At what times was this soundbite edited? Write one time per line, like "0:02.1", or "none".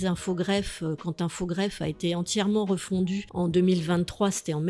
0:03.3